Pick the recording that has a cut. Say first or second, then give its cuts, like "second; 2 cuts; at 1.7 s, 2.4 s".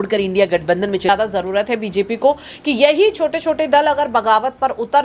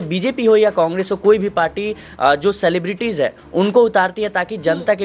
first; 1 cut; at 1.1 s